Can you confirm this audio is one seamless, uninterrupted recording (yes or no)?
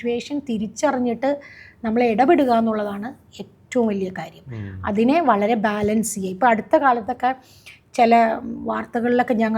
yes